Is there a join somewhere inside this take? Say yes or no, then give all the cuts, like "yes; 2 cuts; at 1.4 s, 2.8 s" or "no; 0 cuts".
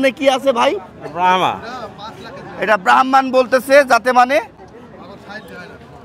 no; 0 cuts